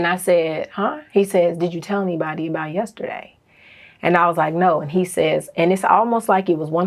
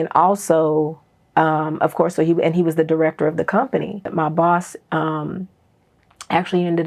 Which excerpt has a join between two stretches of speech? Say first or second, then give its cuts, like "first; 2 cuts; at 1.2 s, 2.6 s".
second; 1 cut; at 4.1 s